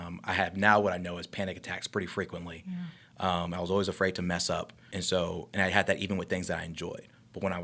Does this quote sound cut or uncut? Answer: cut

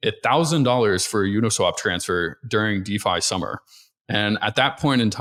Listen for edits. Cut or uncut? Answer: uncut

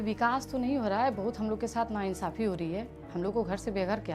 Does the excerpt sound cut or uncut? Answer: cut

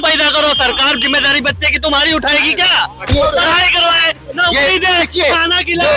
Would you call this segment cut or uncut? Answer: cut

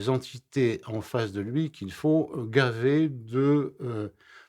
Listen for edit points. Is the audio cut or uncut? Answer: uncut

